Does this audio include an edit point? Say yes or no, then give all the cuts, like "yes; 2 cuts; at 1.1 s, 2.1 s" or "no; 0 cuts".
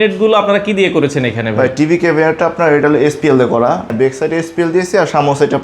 yes; 1 cut; at 3.9 s